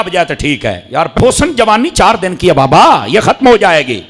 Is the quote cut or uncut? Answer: cut